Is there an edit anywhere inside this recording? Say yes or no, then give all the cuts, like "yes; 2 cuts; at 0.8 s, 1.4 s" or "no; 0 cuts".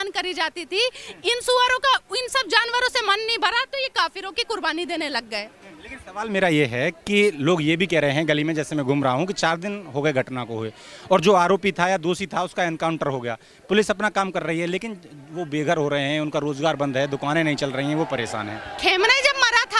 no; 0 cuts